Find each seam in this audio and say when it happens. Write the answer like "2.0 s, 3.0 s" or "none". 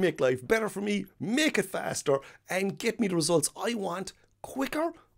none